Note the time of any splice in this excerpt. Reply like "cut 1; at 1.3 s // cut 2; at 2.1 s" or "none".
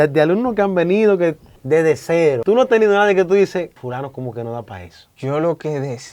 cut 1; at 1.5 s // cut 2; at 2.4 s // cut 3; at 3.8 s // cut 4; at 5.1 s